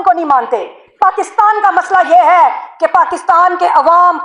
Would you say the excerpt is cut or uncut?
uncut